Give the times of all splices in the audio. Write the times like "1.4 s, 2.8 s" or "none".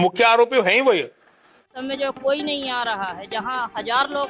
1.7 s